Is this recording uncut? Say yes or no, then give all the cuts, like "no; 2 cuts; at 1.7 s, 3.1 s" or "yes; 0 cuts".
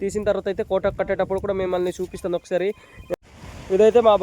no; 1 cut; at 3.1 s